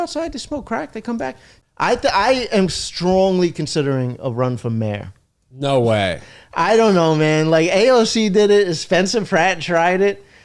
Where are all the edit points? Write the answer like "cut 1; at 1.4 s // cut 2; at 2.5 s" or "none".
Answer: cut 1; at 1.5 s

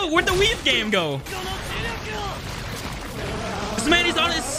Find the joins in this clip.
cut 1; at 1.3 s

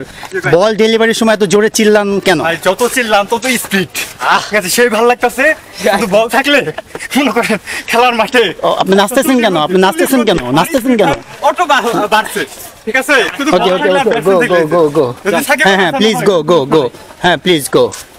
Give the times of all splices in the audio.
none

